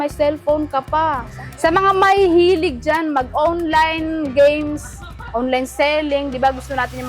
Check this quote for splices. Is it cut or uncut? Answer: cut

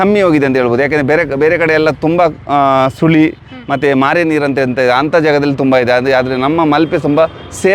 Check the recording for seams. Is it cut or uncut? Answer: uncut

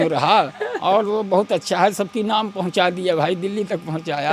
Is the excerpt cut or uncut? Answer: uncut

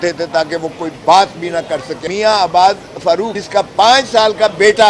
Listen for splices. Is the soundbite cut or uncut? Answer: cut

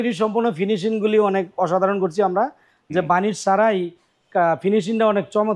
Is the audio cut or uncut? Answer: uncut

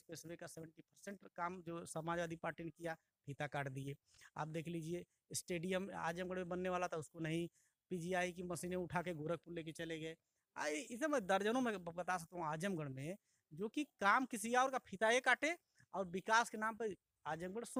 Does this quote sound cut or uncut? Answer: uncut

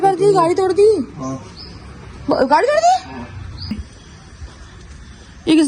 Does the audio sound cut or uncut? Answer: cut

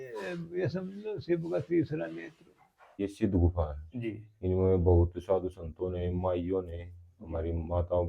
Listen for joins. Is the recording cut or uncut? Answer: cut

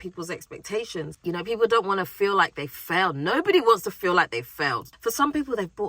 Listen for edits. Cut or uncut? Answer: cut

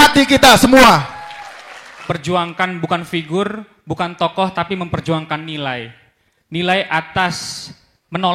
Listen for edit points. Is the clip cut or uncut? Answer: cut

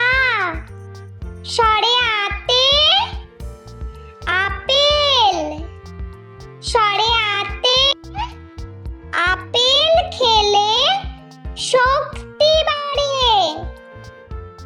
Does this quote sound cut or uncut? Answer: cut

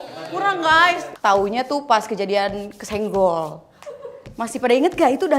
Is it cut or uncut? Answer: cut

